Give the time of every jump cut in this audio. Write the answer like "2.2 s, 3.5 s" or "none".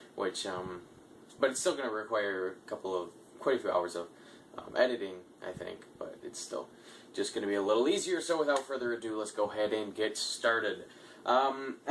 2.3 s